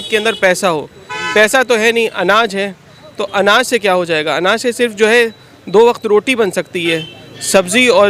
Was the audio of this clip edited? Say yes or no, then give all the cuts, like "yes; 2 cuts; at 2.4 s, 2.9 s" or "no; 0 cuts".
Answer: no; 0 cuts